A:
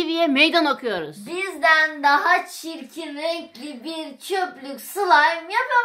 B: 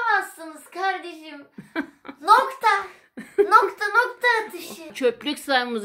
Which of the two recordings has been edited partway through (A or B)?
B